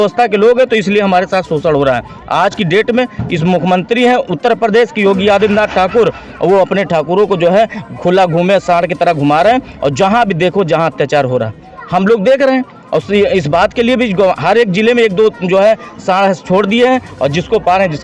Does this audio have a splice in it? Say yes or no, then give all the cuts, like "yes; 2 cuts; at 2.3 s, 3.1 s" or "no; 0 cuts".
no; 0 cuts